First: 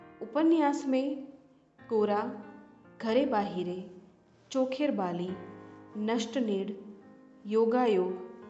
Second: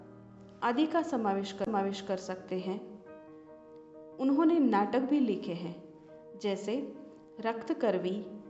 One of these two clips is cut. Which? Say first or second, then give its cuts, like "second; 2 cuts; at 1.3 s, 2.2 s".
second; 1 cut; at 6.6 s